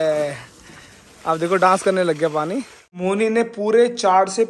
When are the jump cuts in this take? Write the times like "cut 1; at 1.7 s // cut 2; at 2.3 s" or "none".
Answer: cut 1; at 3.0 s